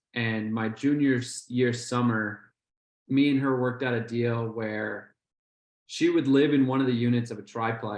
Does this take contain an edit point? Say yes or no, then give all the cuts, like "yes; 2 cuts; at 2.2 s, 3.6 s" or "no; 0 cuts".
no; 0 cuts